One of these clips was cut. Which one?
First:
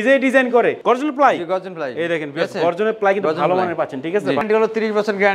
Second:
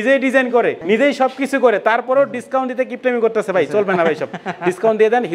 first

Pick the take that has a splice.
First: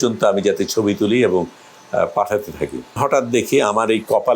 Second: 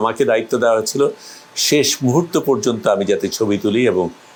first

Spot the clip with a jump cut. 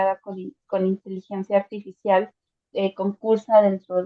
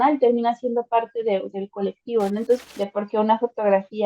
second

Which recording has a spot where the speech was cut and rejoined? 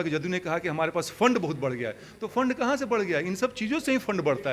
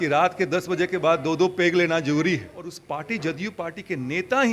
second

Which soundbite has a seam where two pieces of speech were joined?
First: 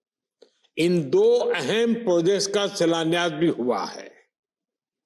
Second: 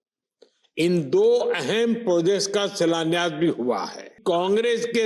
second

